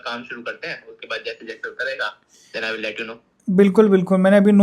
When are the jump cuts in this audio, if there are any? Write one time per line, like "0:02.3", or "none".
none